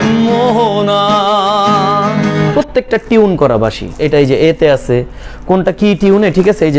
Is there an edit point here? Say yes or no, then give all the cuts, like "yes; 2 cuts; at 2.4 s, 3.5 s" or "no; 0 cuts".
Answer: yes; 2 cuts; at 2.5 s, 3.9 s